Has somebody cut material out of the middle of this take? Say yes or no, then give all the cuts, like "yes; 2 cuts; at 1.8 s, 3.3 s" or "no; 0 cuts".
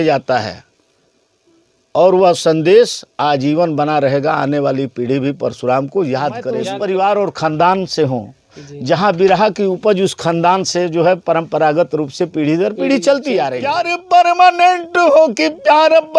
yes; 2 cuts; at 6.7 s, 13.9 s